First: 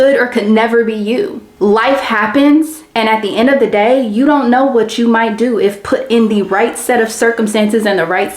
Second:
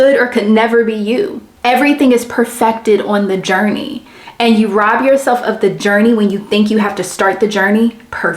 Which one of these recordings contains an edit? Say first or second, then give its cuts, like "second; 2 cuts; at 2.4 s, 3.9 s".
second; 1 cut; at 1.4 s